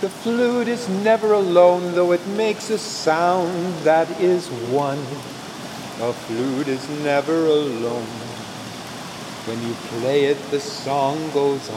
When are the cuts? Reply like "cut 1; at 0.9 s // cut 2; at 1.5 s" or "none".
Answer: cut 1; at 5.4 s